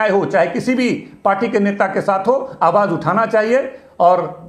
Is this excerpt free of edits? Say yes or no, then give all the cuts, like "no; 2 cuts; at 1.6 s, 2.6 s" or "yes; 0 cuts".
yes; 0 cuts